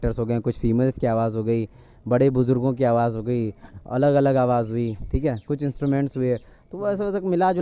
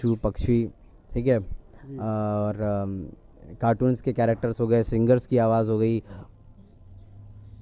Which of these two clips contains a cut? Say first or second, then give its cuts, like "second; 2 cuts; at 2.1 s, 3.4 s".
second; 1 cut; at 6.1 s